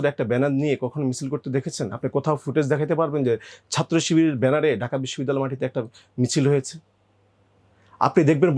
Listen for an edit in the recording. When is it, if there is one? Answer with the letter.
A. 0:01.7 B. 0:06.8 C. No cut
C